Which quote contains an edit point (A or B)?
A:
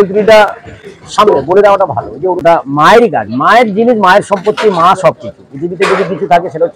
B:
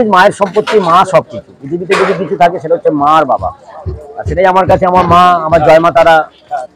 A